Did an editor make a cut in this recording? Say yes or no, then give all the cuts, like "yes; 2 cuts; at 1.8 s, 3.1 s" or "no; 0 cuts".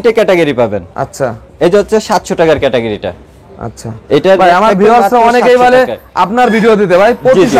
no; 0 cuts